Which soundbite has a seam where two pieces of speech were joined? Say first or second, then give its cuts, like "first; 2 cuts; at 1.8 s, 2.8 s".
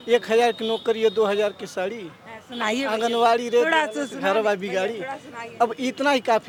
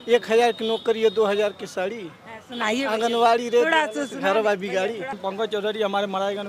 second; 1 cut; at 5.2 s